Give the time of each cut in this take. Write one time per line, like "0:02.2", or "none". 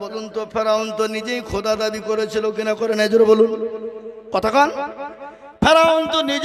none